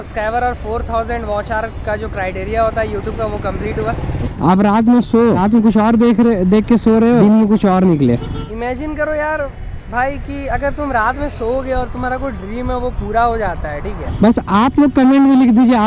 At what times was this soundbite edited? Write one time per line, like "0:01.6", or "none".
0:04.3
0:05.4
0:07.2
0:08.5
0:14.0

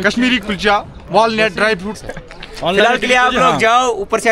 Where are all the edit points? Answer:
0:02.0

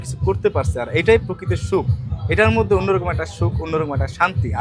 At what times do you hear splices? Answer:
none

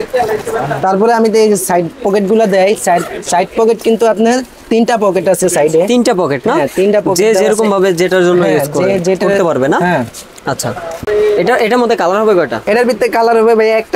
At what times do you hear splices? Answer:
none

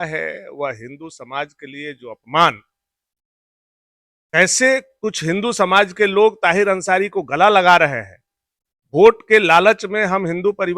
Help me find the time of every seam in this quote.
none

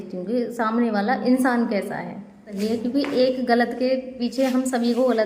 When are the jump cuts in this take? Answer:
0:02.5

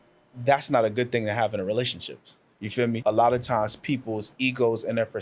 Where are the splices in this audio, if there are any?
0:03.0

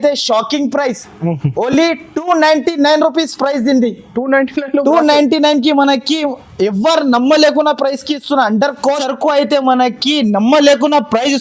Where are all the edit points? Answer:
0:09.0

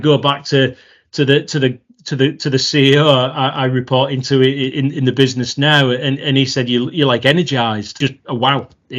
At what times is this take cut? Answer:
0:07.9

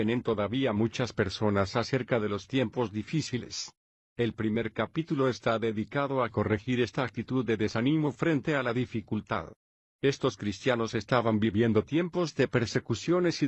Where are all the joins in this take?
0:05.7

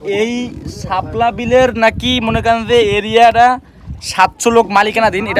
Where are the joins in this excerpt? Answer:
none

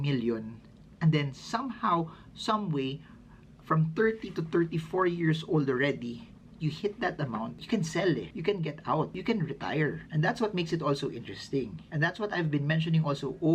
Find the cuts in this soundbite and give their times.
none

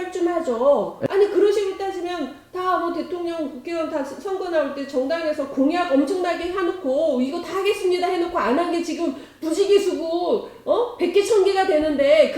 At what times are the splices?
0:01.0

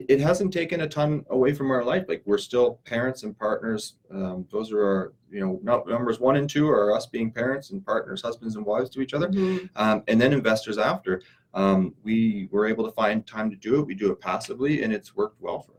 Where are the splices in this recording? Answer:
none

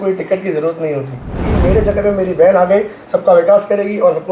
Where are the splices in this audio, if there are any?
0:01.5

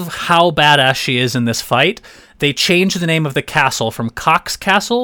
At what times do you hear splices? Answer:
none

